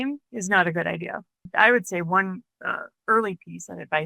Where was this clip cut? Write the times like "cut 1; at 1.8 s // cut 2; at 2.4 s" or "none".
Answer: cut 1; at 1.5 s